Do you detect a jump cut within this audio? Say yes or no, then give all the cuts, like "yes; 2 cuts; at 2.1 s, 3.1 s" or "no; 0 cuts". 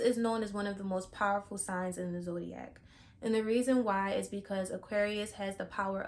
no; 0 cuts